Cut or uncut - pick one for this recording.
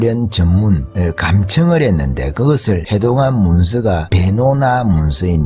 cut